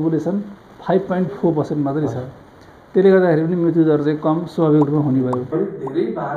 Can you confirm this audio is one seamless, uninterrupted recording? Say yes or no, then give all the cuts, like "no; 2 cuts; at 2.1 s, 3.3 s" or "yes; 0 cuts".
no; 1 cut; at 5.4 s